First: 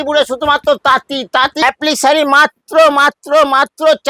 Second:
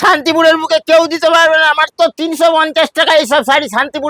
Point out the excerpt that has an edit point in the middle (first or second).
first